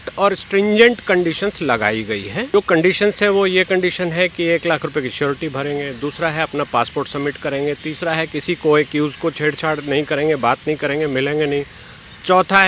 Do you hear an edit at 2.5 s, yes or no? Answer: yes